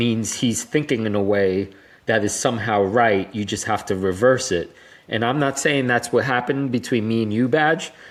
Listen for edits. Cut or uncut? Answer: uncut